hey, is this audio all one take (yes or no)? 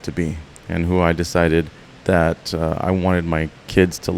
no